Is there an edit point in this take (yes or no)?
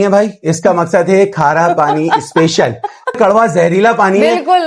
yes